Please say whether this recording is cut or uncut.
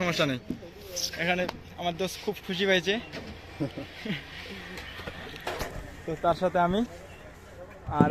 uncut